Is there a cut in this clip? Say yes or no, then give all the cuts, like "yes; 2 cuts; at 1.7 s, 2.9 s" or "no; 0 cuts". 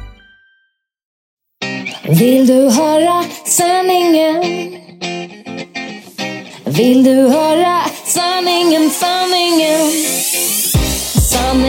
yes; 1 cut; at 1.3 s